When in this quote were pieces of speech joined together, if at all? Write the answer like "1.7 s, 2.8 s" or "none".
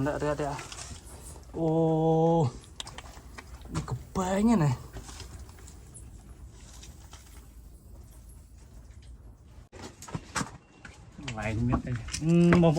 9.8 s